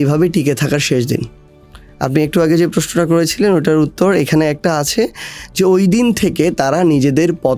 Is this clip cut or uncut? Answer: uncut